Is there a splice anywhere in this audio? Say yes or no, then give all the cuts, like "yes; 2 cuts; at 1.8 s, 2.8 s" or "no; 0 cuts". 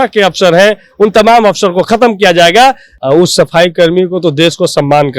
yes; 1 cut; at 2.9 s